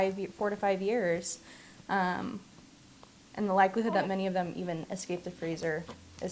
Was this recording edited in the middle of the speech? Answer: no; 0 cuts

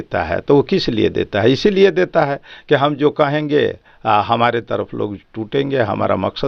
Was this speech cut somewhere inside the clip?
no; 0 cuts

